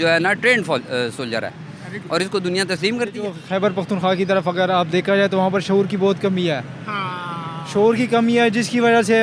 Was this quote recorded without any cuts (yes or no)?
no